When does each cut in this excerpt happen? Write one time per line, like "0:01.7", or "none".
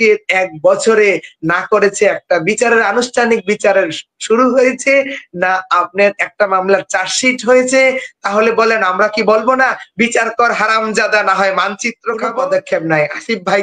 0:12.2